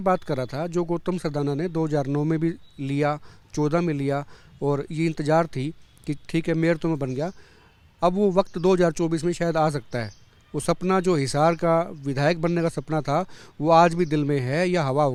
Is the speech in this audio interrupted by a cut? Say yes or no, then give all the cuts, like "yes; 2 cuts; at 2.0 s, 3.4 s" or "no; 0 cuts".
no; 0 cuts